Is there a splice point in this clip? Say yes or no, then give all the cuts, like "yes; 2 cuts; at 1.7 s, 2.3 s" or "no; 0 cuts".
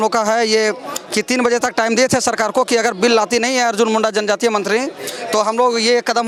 no; 0 cuts